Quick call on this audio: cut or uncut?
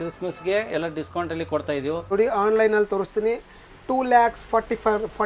cut